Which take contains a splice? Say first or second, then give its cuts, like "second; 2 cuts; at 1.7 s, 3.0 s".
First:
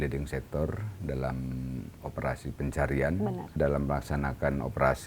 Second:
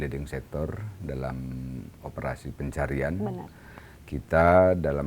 first; 1 cut; at 3.6 s